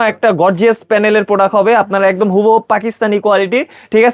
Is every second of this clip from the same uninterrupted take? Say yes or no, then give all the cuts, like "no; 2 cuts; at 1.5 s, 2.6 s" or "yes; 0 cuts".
yes; 0 cuts